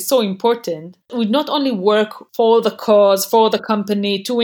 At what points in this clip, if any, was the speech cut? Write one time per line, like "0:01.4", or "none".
0:01.1
0:02.2